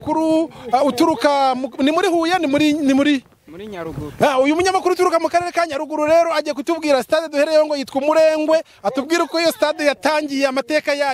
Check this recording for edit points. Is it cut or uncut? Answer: uncut